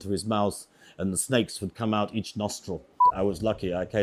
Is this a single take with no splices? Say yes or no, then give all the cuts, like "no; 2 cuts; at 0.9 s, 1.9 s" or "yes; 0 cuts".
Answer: no; 1 cut; at 3.1 s